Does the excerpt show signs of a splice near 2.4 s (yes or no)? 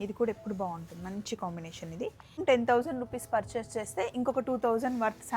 yes